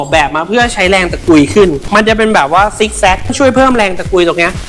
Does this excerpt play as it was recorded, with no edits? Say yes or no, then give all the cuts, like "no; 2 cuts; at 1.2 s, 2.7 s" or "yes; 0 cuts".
yes; 0 cuts